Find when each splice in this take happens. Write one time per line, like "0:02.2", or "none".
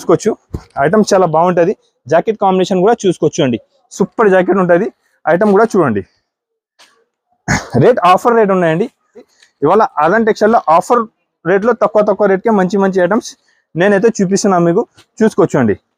0:09.4